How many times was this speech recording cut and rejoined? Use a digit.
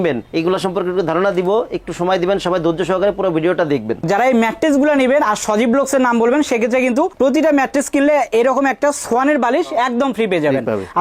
1